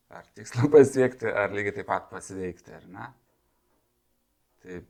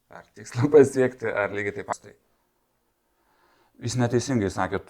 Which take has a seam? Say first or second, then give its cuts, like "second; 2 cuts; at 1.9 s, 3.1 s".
second; 1 cut; at 1.9 s